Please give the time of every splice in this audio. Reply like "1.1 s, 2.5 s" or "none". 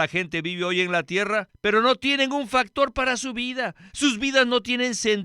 1.5 s